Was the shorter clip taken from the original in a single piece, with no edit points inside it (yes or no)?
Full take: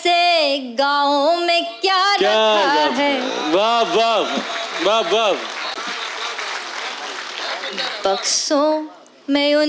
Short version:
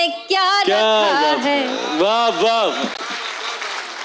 no